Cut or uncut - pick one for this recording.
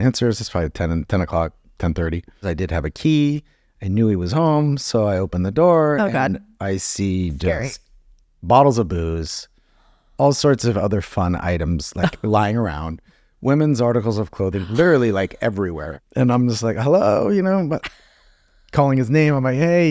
cut